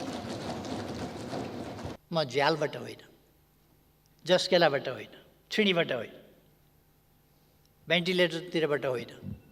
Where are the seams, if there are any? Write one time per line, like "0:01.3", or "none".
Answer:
0:01.9